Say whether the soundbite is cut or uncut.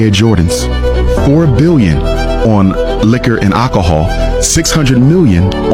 uncut